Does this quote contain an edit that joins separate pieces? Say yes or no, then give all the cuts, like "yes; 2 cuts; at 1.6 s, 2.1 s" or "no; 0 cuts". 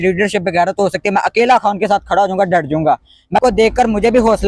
yes; 1 cut; at 3.4 s